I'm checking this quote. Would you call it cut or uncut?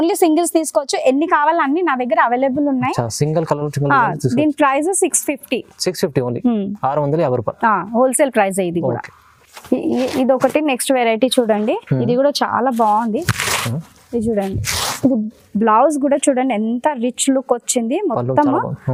uncut